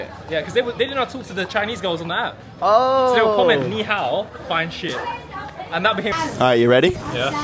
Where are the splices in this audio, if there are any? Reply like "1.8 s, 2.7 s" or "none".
6.1 s